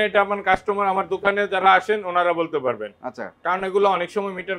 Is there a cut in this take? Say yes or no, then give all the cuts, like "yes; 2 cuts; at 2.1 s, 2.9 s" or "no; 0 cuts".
no; 0 cuts